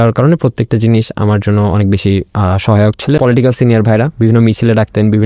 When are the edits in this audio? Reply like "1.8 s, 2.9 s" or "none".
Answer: 3.2 s